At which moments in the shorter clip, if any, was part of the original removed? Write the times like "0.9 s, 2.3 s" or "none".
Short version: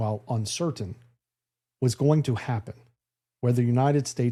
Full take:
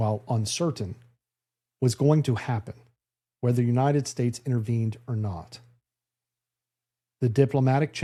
none